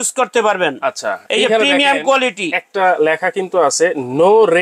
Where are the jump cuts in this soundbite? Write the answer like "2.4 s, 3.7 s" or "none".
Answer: none

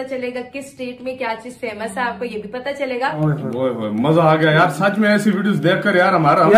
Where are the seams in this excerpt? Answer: 3.2 s

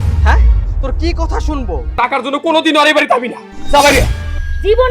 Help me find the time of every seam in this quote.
1.9 s

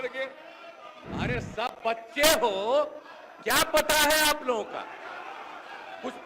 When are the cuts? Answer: 0.9 s

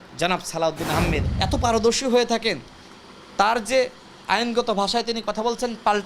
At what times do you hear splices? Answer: 1.2 s

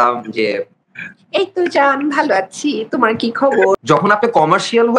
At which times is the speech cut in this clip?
3.8 s

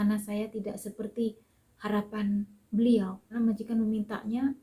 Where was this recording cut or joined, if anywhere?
3.3 s

